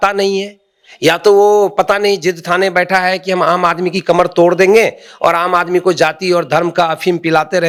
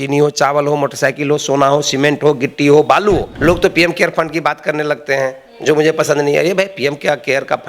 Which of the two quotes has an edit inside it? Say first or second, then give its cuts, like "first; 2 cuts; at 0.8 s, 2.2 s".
second; 1 cut; at 3.3 s